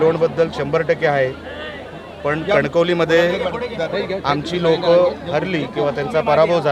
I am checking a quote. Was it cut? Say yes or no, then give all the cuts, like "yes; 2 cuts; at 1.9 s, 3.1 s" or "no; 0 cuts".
no; 0 cuts